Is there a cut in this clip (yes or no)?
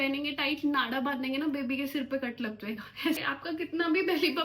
yes